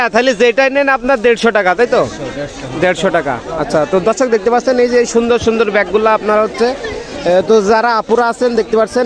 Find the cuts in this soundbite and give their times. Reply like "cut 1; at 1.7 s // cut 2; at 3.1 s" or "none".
none